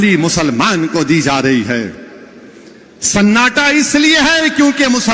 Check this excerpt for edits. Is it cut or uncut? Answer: uncut